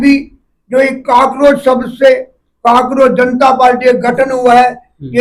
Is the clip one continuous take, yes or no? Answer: yes